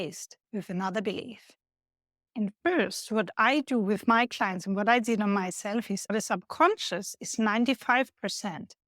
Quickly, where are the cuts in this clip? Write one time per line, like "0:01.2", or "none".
0:06.1